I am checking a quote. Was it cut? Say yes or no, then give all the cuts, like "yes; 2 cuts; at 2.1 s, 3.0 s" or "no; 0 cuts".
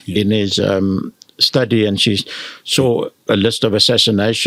no; 0 cuts